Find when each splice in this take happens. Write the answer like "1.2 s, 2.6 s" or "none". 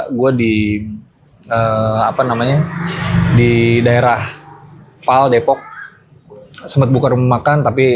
none